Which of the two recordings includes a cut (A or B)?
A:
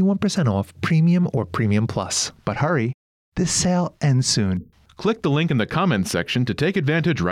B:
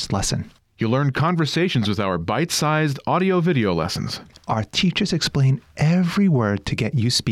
A